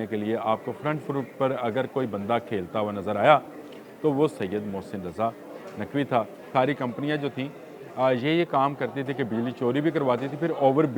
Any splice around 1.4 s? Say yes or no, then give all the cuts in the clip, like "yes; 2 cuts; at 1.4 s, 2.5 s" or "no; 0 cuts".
no; 1 cut; at 6.4 s